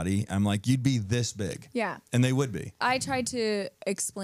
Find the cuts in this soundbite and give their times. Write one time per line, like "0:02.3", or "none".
0:02.7

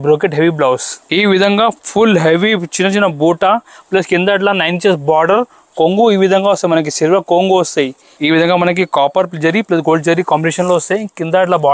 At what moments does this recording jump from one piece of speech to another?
0:00.9
0:08.0

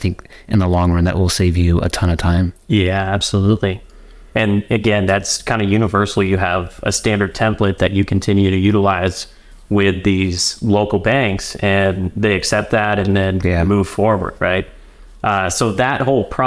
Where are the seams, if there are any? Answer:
none

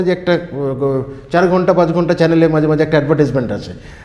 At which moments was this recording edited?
none

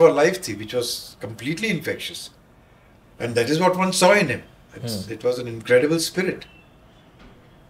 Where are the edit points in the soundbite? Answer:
none

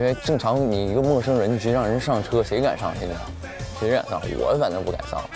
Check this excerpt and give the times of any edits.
none

